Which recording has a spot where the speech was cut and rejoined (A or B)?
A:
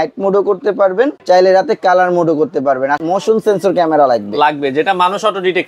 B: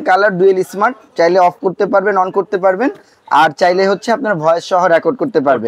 A